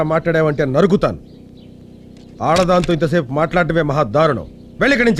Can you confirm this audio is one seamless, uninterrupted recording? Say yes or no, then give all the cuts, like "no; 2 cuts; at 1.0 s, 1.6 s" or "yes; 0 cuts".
yes; 0 cuts